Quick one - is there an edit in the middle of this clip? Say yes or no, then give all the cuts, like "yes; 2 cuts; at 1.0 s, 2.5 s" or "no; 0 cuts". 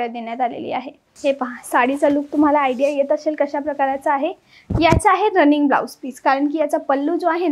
yes; 1 cut; at 1.1 s